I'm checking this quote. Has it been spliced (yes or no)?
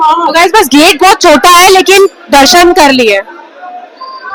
no